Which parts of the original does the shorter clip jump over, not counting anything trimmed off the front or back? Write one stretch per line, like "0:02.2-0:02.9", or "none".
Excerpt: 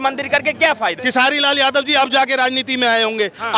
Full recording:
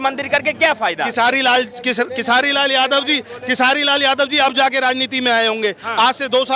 0:01.0-0:03.4

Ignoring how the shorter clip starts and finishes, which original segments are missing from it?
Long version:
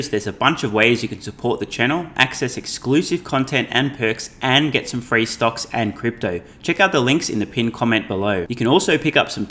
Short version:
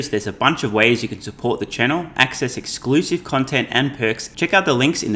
0:04.3-0:06.5

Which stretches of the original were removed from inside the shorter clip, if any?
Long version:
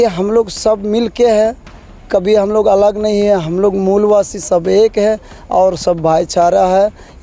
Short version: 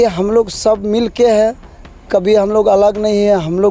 none

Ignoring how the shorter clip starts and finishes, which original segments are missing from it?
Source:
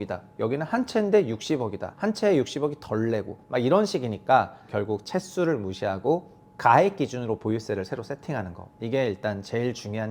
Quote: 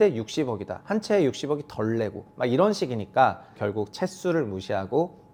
none

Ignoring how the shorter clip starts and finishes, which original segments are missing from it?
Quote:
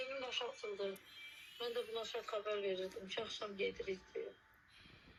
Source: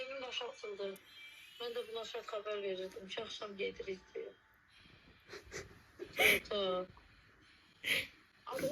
none

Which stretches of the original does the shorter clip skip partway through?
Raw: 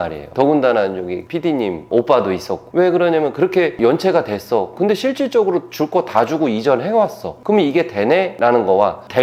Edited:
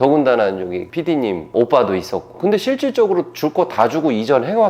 0:02.7-0:04.7

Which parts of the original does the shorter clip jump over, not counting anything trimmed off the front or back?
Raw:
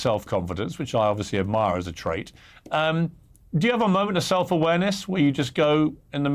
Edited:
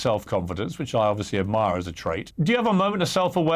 0:02.3-0:03.4

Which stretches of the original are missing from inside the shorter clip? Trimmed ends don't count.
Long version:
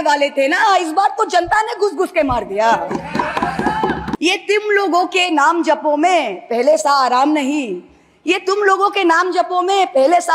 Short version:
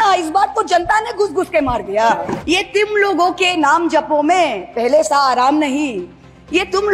0:03.0-0:04.2

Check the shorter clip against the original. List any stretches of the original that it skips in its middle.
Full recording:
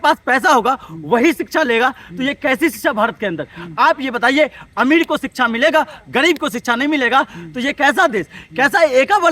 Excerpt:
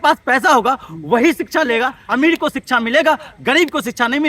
0:02.0-0:04.7

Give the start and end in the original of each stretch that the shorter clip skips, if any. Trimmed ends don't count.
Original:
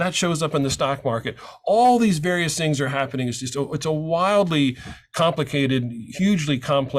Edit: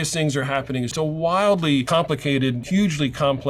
0:03.4-0:03.8
0:05.2-0:05.8

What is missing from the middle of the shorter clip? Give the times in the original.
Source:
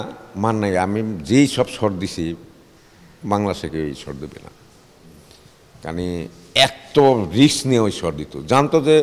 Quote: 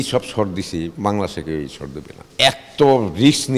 0:02.4-0:03.2
0:04.5-0:06.4

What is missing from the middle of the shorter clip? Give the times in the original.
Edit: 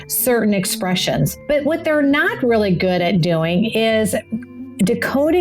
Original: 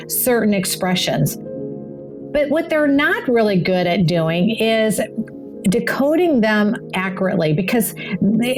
0:01.4-0:02.2

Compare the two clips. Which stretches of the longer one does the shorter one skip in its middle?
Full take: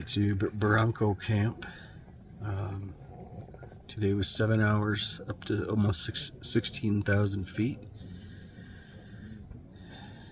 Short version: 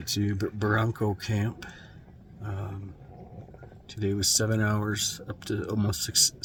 none

